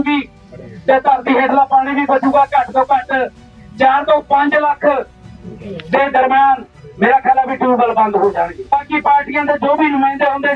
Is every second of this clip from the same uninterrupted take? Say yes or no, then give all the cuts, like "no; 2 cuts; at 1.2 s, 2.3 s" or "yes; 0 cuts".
no; 1 cut; at 8.7 s